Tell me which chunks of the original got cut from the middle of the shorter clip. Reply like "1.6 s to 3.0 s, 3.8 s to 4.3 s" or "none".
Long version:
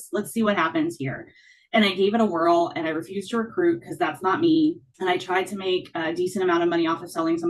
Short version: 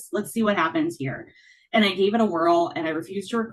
none